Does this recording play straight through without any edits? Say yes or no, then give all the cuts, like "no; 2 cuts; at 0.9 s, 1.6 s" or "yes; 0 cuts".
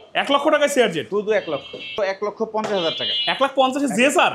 no; 1 cut; at 1.9 s